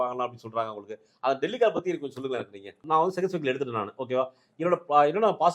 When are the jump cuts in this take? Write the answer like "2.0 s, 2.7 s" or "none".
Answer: 2.8 s